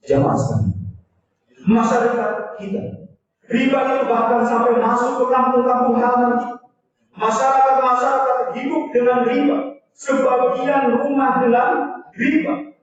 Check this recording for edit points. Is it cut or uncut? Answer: uncut